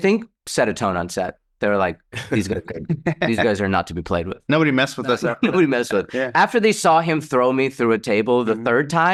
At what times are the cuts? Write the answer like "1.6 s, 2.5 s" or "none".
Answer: none